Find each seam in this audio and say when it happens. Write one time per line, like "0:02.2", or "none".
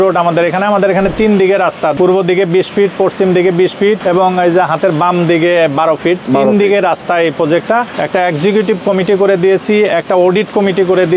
0:01.9
0:04.0
0:08.0